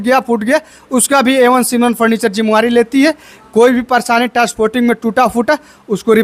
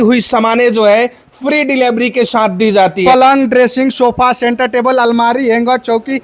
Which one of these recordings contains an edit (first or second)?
second